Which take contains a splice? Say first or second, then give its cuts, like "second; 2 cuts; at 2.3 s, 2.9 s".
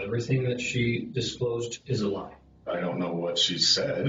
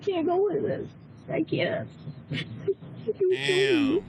first; 2 cuts; at 1.7 s, 2.7 s